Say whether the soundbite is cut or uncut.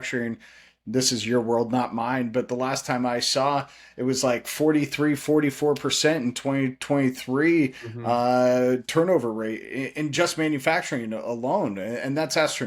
uncut